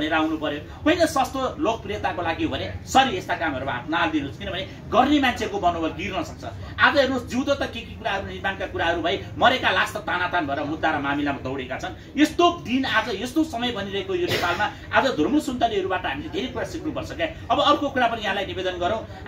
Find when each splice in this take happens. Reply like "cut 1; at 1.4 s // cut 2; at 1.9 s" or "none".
none